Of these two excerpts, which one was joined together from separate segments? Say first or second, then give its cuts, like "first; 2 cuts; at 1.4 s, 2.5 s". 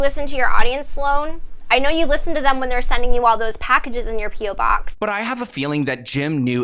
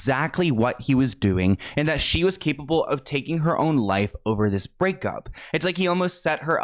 first; 1 cut; at 4.9 s